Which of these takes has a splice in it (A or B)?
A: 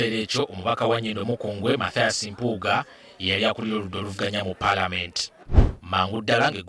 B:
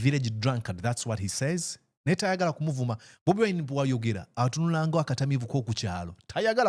A